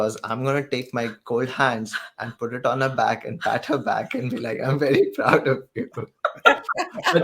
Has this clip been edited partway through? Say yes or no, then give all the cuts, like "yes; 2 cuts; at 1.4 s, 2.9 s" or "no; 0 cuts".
no; 0 cuts